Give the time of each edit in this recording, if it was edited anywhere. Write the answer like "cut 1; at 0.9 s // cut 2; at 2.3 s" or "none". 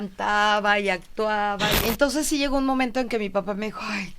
cut 1; at 1.8 s